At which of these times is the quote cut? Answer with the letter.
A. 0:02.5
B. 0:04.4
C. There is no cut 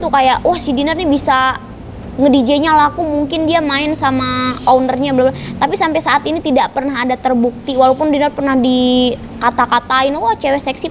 C